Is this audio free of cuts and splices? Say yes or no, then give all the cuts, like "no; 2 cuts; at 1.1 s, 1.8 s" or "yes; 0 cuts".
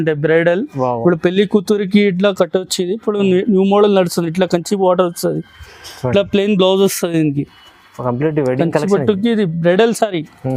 yes; 0 cuts